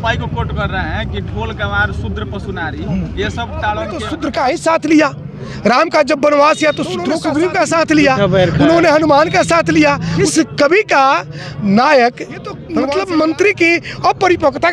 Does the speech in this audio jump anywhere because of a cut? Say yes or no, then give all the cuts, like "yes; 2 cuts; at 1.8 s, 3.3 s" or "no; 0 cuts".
yes; 4 cuts; at 4.2 s, 7.1 s, 10.2 s, 12.6 s